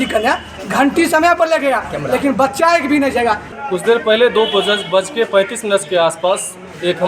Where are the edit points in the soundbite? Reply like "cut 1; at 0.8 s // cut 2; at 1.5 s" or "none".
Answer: cut 1; at 3.5 s